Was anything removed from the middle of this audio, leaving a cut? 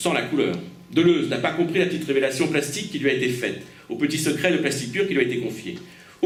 no; 0 cuts

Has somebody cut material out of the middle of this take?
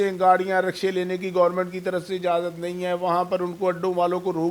no; 0 cuts

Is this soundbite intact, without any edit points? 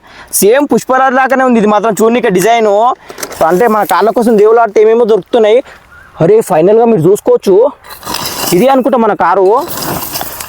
no; 1 cut; at 3.2 s

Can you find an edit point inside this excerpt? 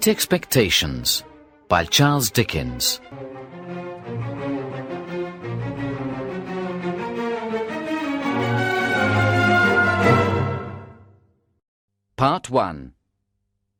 no; 0 cuts

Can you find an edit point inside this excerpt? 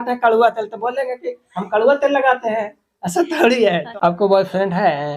yes; 1 cut; at 3.9 s

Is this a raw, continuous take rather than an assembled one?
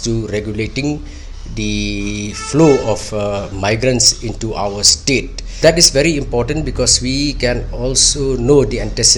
no; 1 cut; at 5.6 s

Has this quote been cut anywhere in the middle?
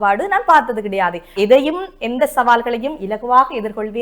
yes; 1 cut; at 1.3 s

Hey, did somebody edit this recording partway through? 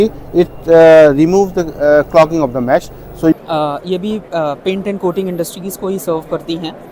yes; 1 cut; at 3.3 s

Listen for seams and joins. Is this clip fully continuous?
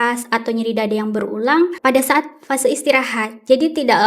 no; 1 cut; at 1.8 s

